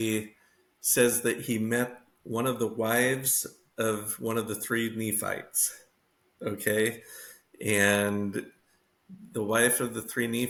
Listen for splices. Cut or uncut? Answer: uncut